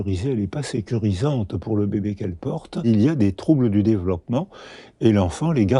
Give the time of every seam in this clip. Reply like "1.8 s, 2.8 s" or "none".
2.9 s